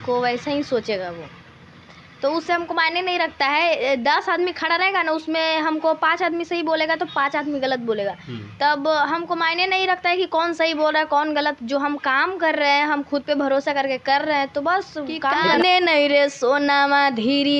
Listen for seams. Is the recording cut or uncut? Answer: cut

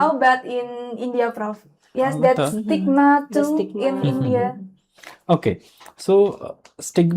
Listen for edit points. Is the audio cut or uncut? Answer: cut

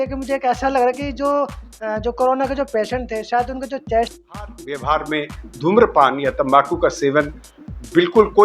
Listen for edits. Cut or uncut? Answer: cut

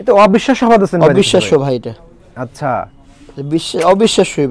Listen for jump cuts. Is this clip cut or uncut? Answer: uncut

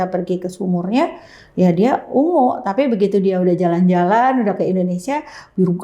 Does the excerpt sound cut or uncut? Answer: uncut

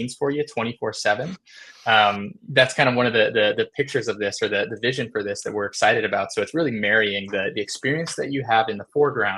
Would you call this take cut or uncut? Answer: uncut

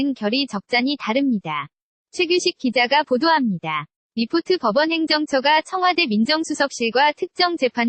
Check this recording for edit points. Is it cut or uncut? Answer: uncut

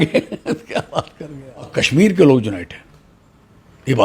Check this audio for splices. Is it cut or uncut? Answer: cut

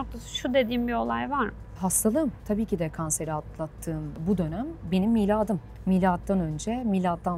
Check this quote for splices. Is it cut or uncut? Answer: cut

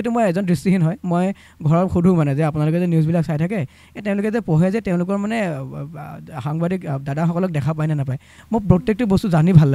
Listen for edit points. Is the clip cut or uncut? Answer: uncut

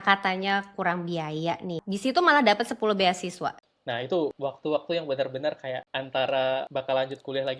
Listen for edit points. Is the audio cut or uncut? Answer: cut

